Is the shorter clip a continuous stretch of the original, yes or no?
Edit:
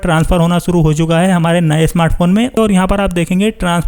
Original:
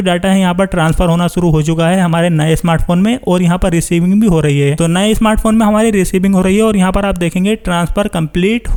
no